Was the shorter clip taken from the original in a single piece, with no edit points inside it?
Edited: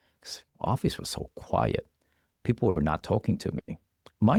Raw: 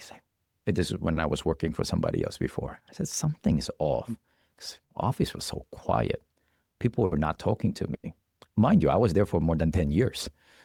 yes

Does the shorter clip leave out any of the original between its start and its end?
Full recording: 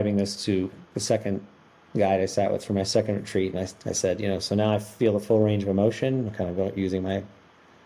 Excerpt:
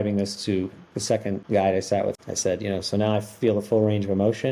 yes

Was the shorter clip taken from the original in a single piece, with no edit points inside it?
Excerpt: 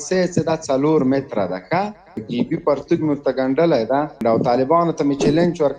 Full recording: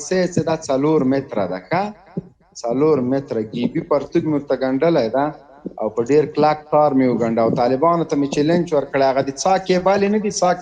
no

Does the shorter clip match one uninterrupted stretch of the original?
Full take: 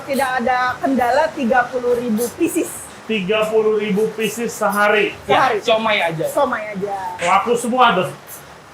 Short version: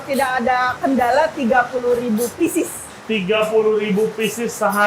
yes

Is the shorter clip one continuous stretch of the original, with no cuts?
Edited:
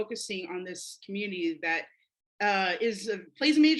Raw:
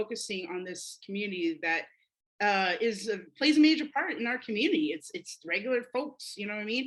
yes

